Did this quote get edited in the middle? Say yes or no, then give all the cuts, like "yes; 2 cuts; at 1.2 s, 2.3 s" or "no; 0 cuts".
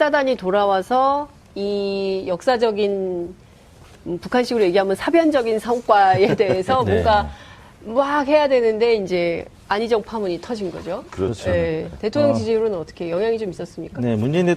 yes; 1 cut; at 10.9 s